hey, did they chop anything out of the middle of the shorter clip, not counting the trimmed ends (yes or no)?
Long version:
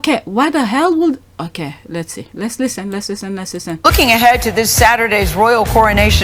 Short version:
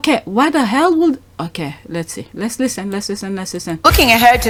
no